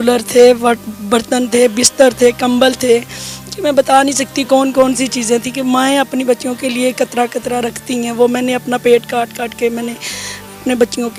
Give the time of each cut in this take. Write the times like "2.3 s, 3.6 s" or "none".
none

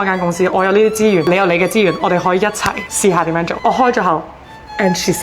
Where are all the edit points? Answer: 2.9 s, 3.5 s

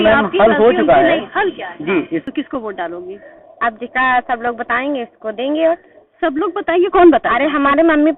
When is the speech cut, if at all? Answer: 2.2 s

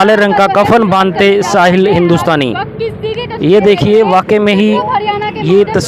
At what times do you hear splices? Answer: none

